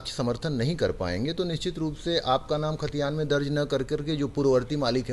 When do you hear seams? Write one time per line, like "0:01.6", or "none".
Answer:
none